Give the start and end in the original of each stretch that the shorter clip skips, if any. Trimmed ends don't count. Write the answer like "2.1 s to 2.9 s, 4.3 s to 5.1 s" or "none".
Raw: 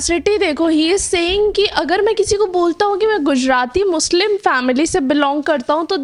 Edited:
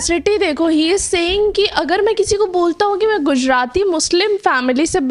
none